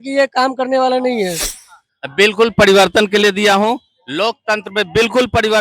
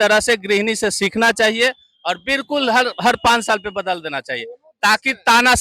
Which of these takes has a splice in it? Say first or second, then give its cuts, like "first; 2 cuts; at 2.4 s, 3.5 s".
first; 1 cut; at 1.4 s